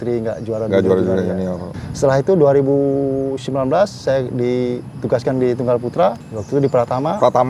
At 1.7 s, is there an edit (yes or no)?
no